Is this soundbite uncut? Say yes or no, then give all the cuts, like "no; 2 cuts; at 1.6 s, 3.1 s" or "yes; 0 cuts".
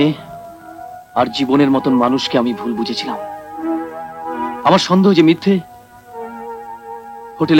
yes; 0 cuts